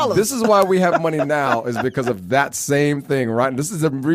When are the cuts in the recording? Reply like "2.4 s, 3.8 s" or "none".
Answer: none